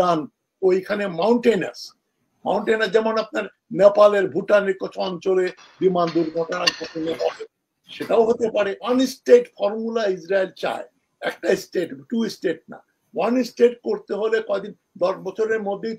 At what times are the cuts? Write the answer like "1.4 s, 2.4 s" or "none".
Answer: 8.9 s